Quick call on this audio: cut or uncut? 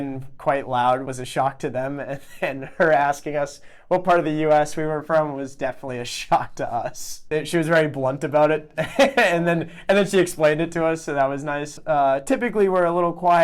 cut